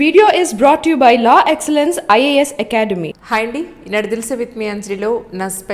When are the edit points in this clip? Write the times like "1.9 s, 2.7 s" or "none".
none